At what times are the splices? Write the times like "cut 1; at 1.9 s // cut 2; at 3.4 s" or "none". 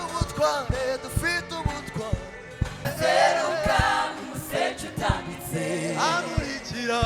cut 1; at 2.9 s